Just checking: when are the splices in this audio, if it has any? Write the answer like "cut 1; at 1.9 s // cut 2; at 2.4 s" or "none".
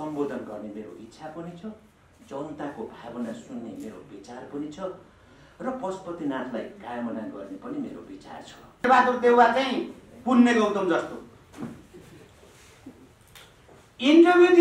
cut 1; at 8.8 s